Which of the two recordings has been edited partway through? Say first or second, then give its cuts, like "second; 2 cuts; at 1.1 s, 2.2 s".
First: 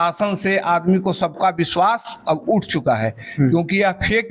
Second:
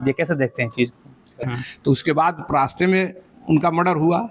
second; 1 cut; at 1.4 s